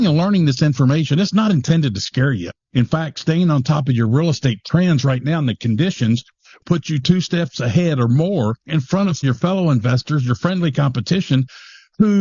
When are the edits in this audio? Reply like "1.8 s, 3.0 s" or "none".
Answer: 2.5 s, 6.6 s, 9.2 s